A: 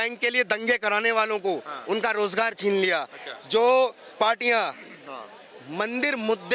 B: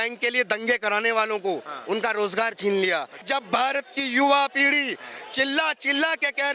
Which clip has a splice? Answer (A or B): B